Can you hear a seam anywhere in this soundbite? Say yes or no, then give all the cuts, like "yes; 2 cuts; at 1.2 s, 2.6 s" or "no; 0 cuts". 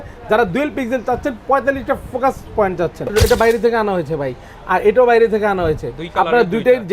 yes; 1 cut; at 3.1 s